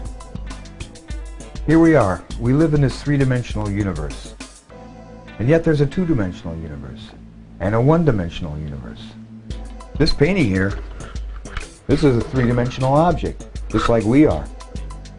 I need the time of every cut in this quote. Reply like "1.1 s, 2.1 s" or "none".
none